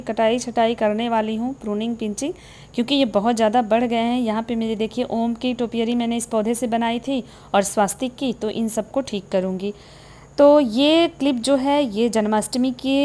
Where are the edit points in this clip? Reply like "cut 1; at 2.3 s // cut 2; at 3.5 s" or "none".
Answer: none